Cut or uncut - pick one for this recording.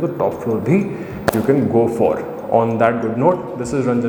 uncut